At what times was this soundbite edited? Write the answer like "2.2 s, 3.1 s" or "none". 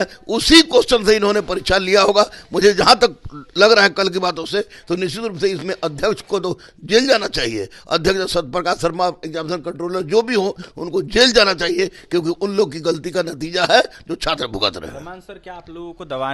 none

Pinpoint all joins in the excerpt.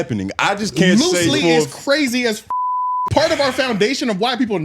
2.4 s

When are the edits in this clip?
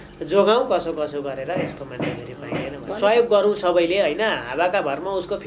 2.8 s

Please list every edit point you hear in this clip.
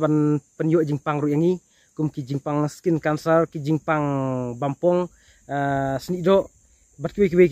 none

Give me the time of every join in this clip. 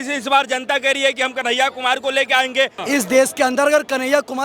2.8 s

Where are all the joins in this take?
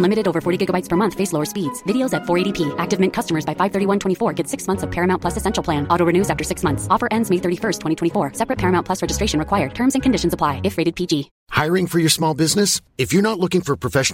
11.4 s

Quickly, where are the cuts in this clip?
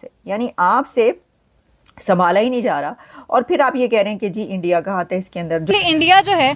5.6 s

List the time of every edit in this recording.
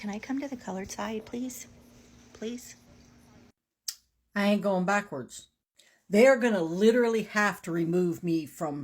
3.7 s

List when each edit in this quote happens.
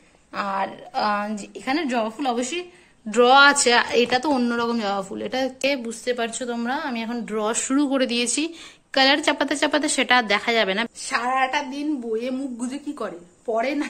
5.6 s, 10.9 s

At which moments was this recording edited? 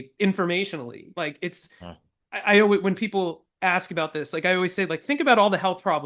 1.1 s

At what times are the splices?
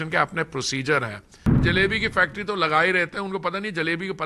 1.6 s

